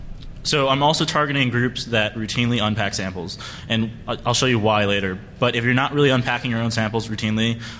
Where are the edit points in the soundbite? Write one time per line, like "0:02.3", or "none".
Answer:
0:02.1

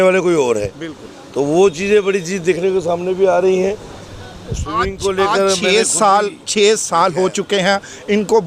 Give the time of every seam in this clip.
none

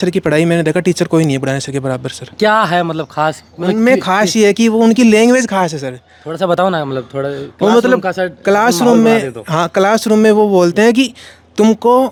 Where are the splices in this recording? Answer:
none

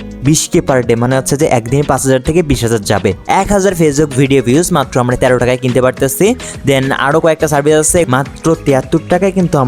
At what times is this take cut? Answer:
0:03.2
0:08.1

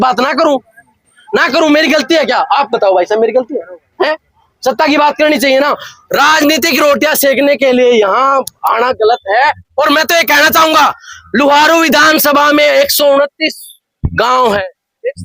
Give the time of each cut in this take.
none

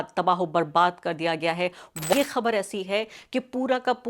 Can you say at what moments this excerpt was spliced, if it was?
0:02.1

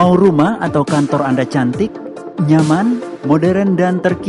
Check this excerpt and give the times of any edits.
none

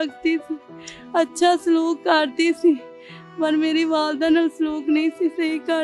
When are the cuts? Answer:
none

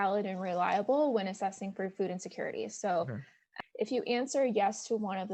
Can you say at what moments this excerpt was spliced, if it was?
0:03.4

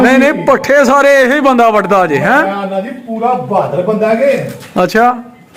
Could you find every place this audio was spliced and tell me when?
none

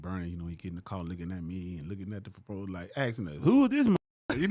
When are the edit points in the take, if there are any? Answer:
none

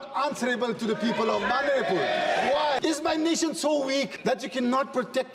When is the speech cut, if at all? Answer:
0:02.8
0:04.1

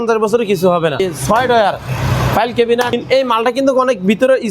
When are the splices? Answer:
0:01.0
0:02.9

